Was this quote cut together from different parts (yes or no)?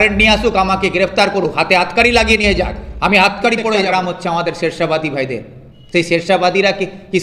yes